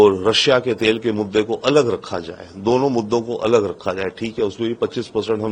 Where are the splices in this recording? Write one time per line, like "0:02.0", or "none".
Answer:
none